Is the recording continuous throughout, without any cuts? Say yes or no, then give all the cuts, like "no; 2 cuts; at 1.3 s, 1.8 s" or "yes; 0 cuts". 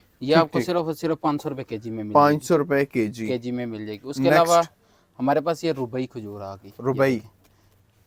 yes; 0 cuts